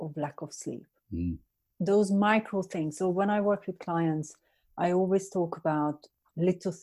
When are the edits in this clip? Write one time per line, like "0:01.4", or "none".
none